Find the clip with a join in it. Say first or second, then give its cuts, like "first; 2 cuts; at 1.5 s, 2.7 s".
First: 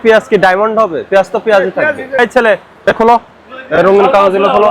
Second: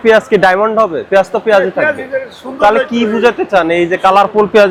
first; 1 cut; at 2.2 s